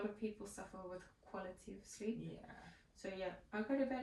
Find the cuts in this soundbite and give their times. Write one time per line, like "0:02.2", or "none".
none